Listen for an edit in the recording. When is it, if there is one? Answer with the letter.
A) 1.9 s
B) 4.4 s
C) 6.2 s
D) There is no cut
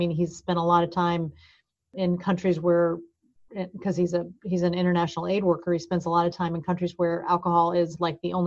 A